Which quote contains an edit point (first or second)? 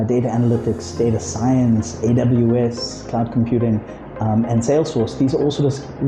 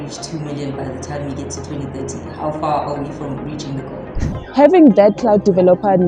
second